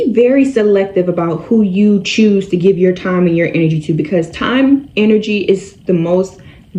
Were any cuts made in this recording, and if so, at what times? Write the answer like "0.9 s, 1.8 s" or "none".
none

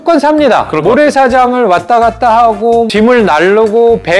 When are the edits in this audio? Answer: 2.9 s

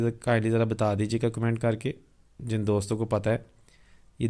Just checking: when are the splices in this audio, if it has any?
none

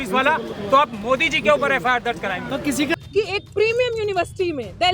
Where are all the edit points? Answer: 3.0 s

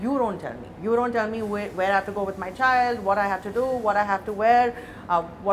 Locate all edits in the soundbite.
none

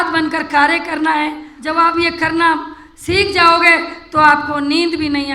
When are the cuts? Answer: 1.5 s

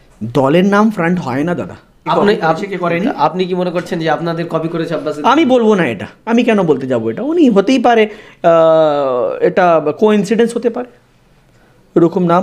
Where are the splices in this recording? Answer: 2.1 s

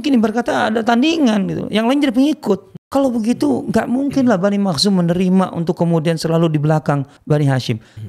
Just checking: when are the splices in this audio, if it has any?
2.7 s, 7.1 s

